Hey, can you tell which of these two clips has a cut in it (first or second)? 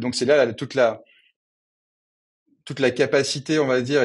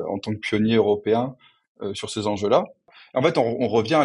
second